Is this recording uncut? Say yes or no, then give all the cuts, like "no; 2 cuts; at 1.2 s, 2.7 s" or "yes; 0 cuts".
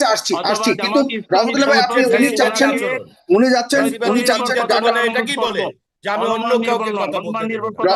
yes; 0 cuts